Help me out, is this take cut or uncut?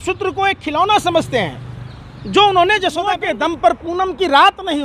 cut